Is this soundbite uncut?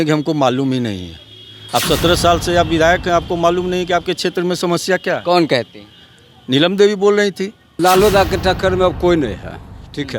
no; 1 cut; at 7.7 s

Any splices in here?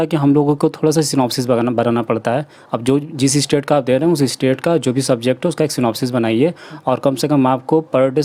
no; 0 cuts

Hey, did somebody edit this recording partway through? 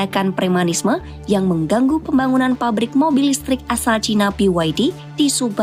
no; 0 cuts

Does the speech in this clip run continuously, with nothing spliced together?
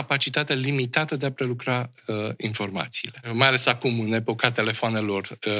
no; 1 cut; at 3.3 s

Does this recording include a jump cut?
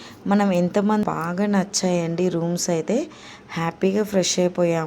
yes; 1 cut; at 1.0 s

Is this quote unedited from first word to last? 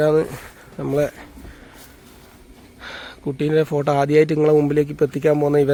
yes; 0 cuts

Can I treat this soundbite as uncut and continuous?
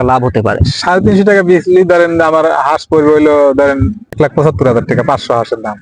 no; 1 cut; at 4.2 s

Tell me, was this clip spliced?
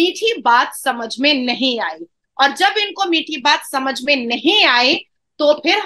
no; 0 cuts

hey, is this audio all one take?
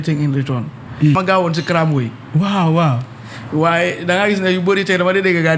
no; 1 cut; at 1.1 s

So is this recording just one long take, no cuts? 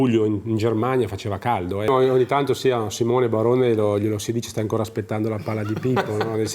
no; 1 cut; at 1.9 s

